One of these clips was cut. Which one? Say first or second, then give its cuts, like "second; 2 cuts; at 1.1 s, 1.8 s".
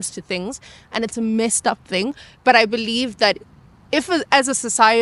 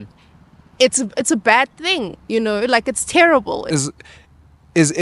second; 1 cut; at 3.6 s